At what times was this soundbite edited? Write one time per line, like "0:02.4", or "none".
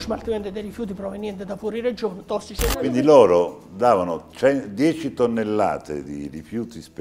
0:02.7